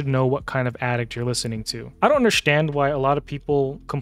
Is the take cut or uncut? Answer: cut